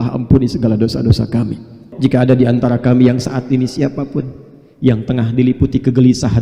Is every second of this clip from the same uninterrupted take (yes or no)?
no